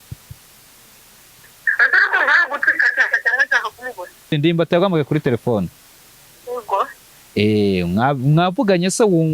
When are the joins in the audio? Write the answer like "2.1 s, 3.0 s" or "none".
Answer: 4.3 s